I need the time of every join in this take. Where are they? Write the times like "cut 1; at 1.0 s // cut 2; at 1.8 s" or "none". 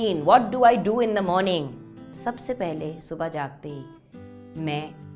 cut 1; at 2.1 s